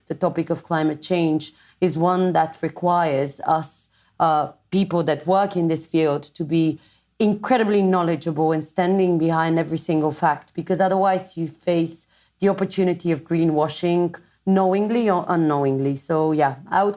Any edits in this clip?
no; 0 cuts

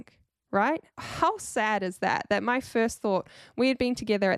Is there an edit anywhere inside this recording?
yes; 1 cut; at 1.0 s

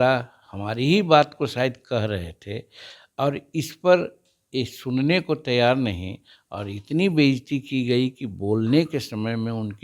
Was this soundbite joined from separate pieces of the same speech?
no; 0 cuts

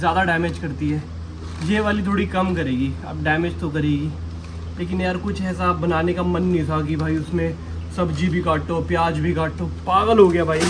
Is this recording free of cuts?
yes; 0 cuts

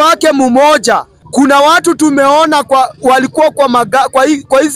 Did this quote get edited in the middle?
yes; 1 cut; at 1.1 s

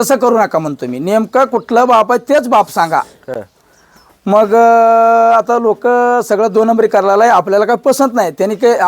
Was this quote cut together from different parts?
no; 0 cuts

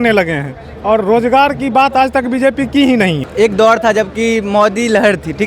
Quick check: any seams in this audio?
yes; 1 cut; at 3.2 s

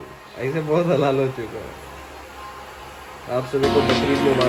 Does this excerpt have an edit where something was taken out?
no; 0 cuts

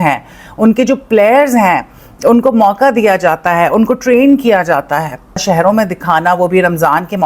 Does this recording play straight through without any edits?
no; 1 cut; at 5.4 s

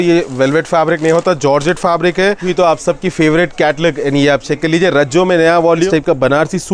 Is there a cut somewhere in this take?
yes; 2 cuts; at 2.4 s, 5.9 s

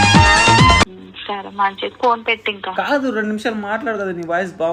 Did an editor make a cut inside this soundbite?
yes; 1 cut; at 0.9 s

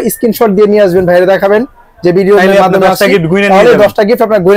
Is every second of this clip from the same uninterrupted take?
yes; 0 cuts

